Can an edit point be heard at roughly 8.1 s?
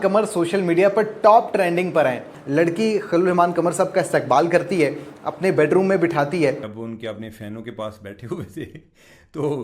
no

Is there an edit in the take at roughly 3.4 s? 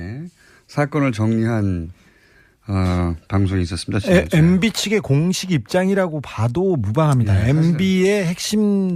no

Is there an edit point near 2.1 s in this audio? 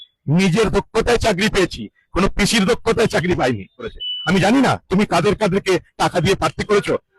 no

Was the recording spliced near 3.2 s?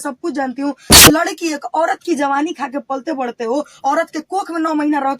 no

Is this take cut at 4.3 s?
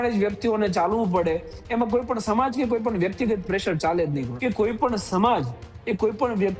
yes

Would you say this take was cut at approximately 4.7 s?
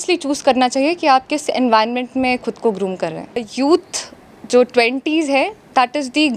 no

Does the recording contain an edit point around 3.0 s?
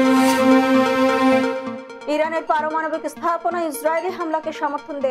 no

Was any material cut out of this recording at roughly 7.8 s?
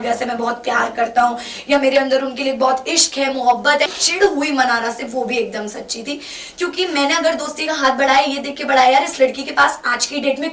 no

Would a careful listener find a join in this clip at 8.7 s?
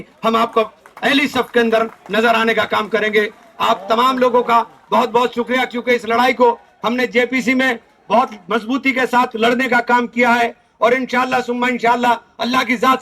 no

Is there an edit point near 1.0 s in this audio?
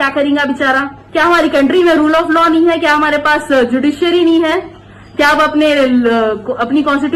yes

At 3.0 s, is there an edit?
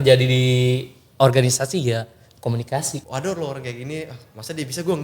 yes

